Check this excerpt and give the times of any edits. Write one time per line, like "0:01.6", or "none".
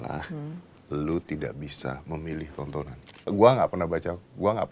0:03.3